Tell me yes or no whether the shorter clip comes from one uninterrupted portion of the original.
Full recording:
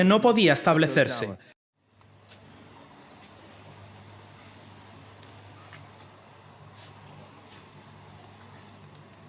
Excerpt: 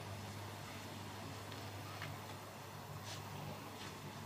yes